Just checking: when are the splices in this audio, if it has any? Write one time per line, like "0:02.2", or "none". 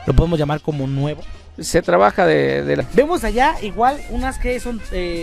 0:02.8

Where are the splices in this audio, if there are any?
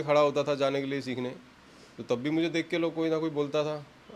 none

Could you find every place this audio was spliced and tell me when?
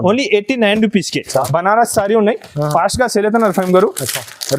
0:01.4

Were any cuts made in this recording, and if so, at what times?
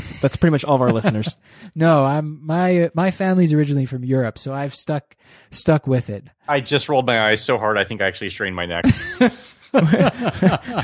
0:06.4

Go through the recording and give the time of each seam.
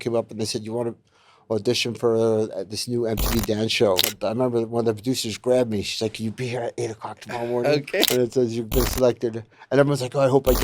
0:04.1
0:08.1

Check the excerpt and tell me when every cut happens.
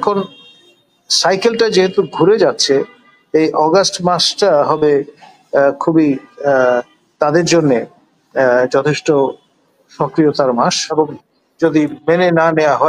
0:10.8

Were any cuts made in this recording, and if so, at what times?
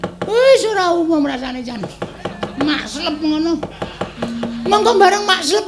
0:02.1

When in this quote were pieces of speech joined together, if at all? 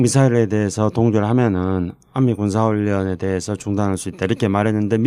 0:03.5

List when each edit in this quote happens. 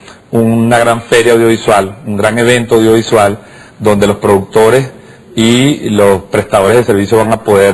0:04.5

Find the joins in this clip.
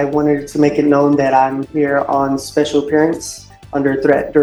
none

